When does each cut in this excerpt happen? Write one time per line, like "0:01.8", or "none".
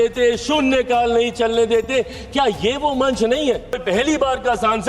0:03.8

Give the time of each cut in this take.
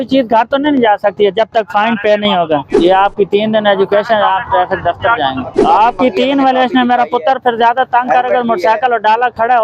0:02.7
0:05.6

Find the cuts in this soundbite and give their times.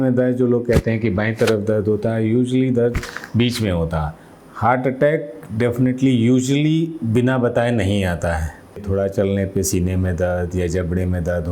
0:04.2
0:08.8

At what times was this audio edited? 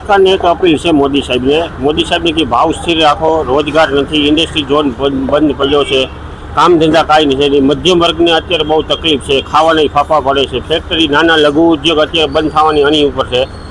none

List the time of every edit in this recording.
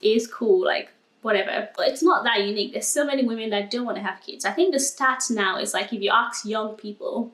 0:01.7

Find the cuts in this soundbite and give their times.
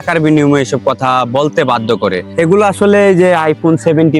0:02.2

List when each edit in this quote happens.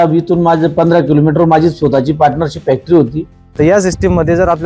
0:03.5

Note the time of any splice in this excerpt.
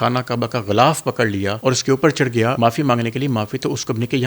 0:01.5
0:02.6

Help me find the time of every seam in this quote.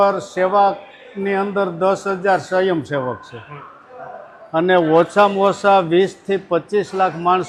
none

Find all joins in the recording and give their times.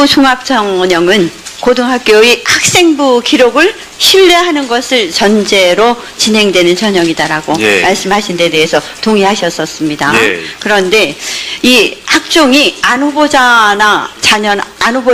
none

